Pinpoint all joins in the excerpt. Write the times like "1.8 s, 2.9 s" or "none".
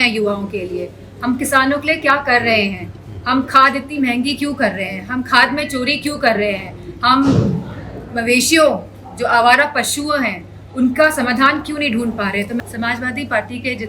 12.6 s

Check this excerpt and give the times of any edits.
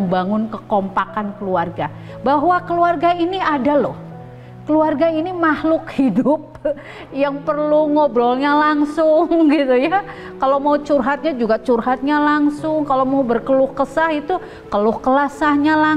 none

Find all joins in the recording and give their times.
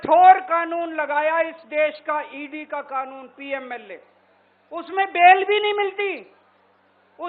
none

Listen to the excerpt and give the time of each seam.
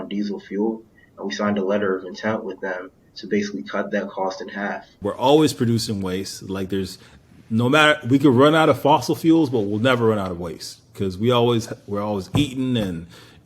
5.0 s

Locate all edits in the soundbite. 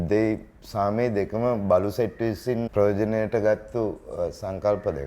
2.7 s

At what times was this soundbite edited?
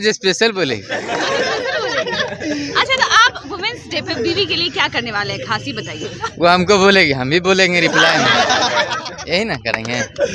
none

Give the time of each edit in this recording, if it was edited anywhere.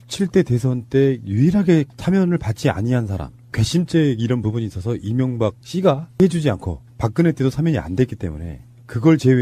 none

